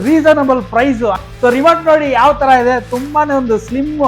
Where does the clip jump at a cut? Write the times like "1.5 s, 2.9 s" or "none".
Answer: 1.2 s